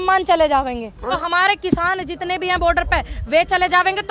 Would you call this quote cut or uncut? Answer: cut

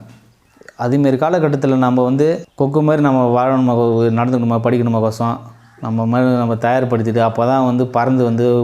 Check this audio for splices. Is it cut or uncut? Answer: cut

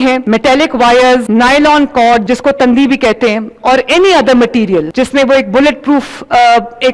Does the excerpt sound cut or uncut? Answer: uncut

